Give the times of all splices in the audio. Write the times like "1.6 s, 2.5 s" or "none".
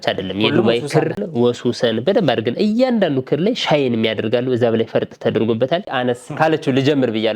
1.2 s, 5.9 s